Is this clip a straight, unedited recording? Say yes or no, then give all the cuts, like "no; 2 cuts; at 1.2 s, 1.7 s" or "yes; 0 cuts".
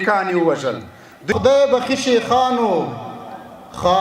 no; 1 cut; at 1.3 s